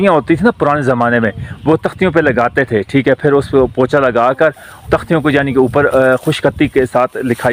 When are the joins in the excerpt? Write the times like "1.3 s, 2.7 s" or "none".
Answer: none